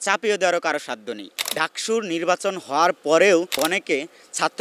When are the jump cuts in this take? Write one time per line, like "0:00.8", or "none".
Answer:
0:01.3
0:03.6